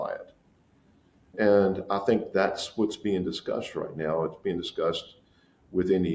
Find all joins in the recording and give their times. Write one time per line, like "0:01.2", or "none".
none